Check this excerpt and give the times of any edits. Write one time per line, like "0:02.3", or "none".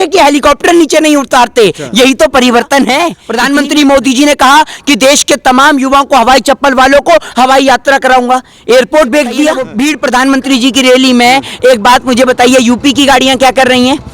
0:03.2
0:09.7